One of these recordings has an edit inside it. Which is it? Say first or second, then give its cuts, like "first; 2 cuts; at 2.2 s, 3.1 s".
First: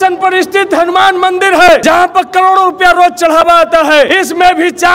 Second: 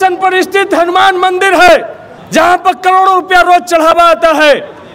first; 2 cuts; at 1.8 s, 4.1 s